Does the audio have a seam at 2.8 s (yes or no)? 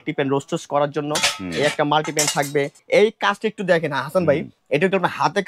yes